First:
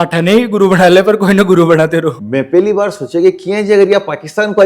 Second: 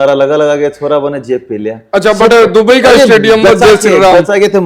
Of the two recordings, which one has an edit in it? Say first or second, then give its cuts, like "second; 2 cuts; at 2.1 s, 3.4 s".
first; 1 cut; at 2.2 s